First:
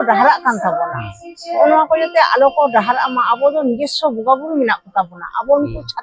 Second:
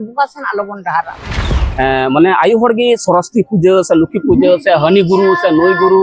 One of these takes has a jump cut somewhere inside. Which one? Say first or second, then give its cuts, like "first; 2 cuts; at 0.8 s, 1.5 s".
second; 1 cut; at 1.6 s